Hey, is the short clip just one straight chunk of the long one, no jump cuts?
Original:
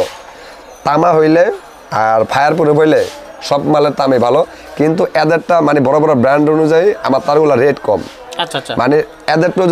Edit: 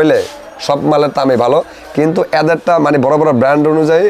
yes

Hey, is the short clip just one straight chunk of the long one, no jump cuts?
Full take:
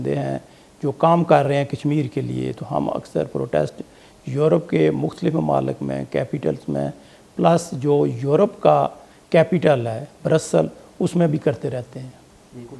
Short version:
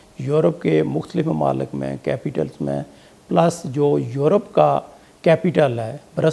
yes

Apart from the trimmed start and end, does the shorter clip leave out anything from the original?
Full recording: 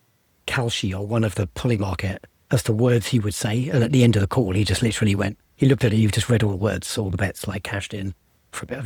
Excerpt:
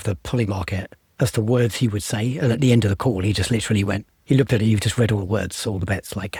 no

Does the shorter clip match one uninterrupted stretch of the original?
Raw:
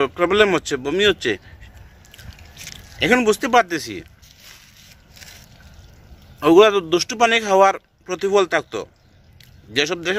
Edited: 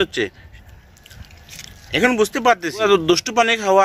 no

